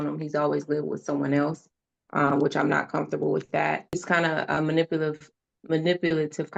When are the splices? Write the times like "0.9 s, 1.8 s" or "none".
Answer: 4.0 s